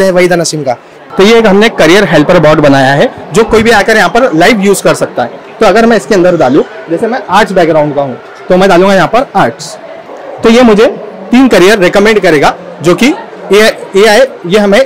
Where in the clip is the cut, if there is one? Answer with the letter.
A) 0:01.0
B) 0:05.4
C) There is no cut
A